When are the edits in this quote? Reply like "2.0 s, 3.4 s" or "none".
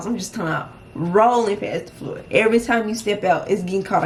none